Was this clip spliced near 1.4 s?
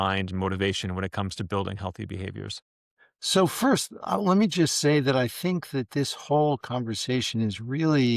no; 1 cut; at 2.9 s

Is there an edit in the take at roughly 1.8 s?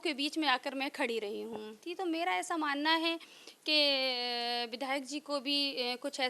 yes; 1 cut; at 1.8 s

